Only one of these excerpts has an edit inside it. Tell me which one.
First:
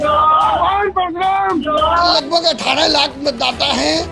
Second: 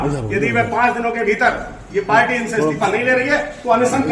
first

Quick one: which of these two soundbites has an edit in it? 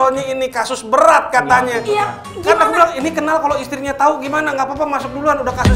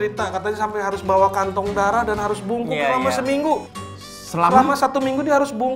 second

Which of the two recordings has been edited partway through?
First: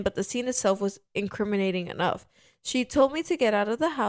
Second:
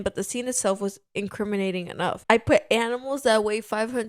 second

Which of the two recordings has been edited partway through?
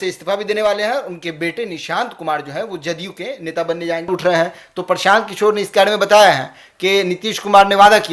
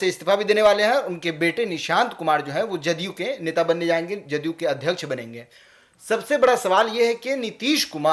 first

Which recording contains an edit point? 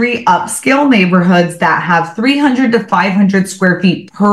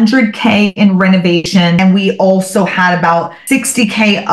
second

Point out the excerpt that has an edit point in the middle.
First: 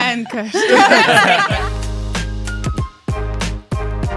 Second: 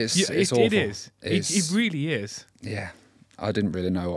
first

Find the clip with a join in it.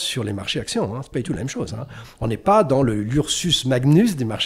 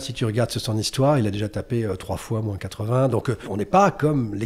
second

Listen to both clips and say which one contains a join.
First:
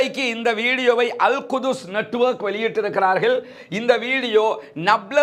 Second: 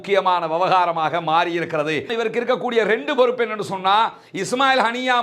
second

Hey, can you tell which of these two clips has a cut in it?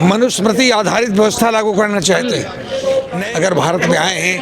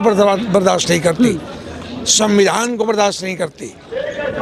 first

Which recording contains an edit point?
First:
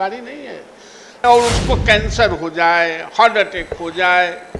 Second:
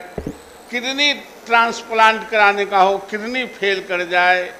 first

